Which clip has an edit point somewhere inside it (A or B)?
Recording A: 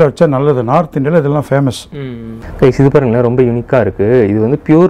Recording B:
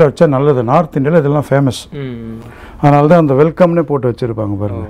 A